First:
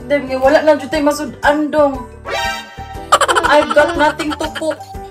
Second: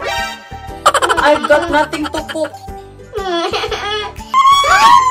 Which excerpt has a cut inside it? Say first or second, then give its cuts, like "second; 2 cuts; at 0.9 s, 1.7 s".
second; 1 cut; at 4.2 s